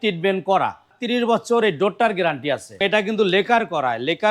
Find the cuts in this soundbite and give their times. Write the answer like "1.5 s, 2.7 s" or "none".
0.9 s, 2.8 s